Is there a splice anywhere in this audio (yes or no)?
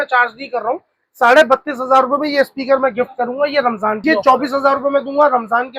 yes